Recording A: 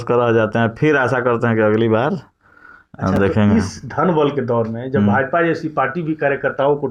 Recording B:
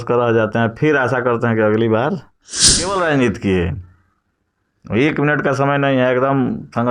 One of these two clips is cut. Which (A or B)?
B